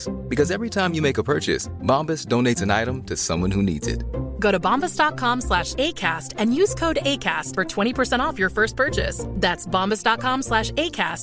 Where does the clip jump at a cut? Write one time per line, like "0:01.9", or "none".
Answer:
none